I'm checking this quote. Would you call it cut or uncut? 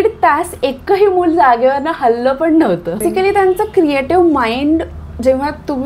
uncut